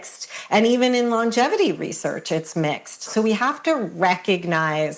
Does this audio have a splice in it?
yes; 1 cut; at 3.1 s

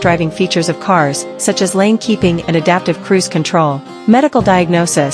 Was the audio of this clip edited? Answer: yes; 1 cut; at 3.9 s

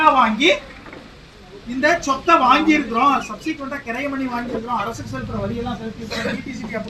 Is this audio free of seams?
yes; 0 cuts

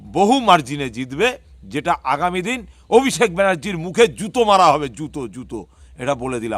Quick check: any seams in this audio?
no; 0 cuts

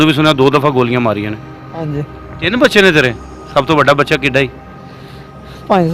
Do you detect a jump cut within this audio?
yes; 1 cut; at 2.1 s

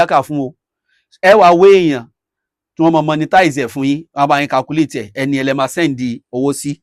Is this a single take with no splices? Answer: yes; 0 cuts

